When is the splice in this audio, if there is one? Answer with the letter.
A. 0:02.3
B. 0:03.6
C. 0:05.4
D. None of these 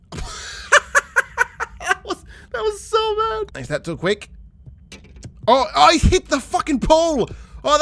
B